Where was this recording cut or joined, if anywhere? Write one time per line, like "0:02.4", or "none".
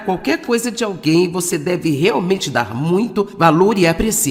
none